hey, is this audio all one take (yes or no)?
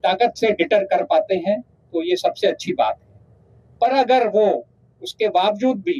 yes